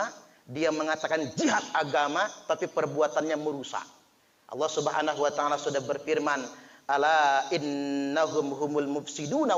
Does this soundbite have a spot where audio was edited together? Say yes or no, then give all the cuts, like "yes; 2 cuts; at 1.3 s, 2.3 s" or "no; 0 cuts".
no; 0 cuts